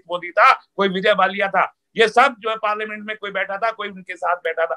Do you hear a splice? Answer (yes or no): no